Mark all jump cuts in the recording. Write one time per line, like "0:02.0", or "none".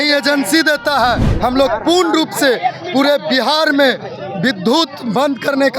0:01.3